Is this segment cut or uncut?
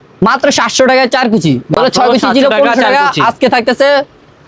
uncut